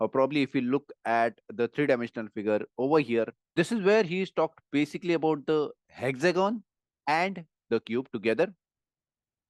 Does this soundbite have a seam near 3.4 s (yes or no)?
yes